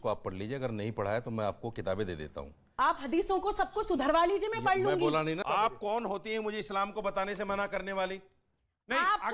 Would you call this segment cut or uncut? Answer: cut